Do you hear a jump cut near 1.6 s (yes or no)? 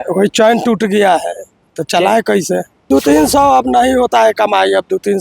no